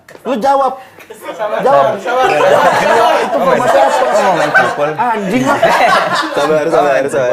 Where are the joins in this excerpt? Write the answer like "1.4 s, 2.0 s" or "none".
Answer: none